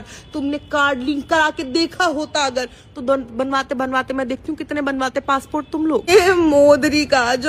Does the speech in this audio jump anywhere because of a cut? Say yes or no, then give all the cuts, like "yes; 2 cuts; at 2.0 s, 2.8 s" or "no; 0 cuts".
no; 0 cuts